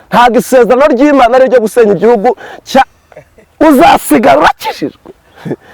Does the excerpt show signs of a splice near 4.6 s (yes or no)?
no